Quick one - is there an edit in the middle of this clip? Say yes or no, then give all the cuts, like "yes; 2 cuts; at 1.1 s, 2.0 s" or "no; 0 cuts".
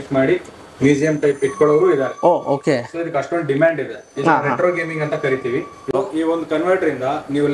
yes; 1 cut; at 5.8 s